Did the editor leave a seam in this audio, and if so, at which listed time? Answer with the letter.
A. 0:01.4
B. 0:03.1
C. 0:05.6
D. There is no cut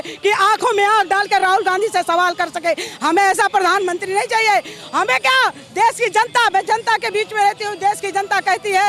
D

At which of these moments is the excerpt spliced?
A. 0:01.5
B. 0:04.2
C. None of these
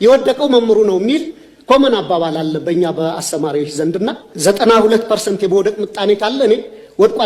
B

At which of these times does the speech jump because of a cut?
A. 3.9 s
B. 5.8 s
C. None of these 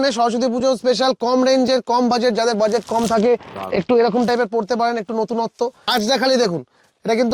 B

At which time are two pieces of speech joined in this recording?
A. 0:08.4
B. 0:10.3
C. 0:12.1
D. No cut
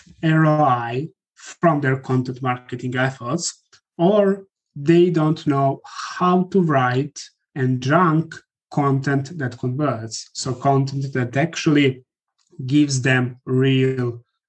D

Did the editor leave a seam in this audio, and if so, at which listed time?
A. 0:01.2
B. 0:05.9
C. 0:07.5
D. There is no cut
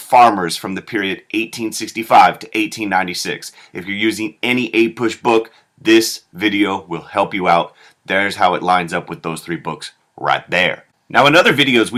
D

